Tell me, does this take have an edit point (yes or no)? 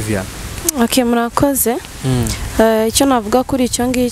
no